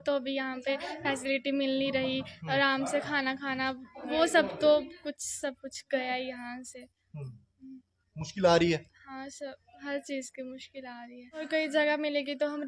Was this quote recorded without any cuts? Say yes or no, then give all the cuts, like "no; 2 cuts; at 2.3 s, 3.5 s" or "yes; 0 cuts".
no; 1 cut; at 11.5 s